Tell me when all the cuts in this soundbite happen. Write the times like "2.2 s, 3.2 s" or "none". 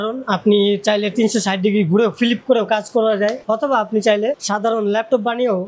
3.4 s, 4.4 s